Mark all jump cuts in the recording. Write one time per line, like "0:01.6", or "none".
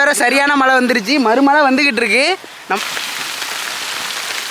0:02.8